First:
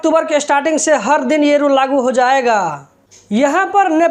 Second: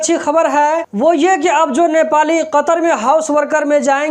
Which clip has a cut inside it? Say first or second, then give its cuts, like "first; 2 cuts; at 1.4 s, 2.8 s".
first; 1 cut; at 3.0 s